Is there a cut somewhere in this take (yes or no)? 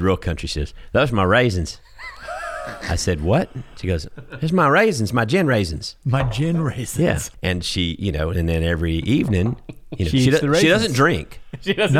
yes